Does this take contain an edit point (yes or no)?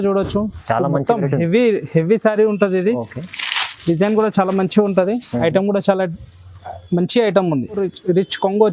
yes